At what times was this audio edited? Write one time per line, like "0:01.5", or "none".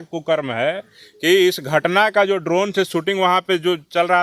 none